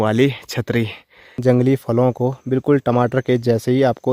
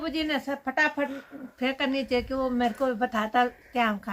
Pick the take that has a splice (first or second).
first